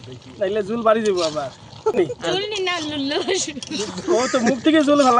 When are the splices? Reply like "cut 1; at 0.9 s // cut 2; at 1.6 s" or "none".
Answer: cut 1; at 2.0 s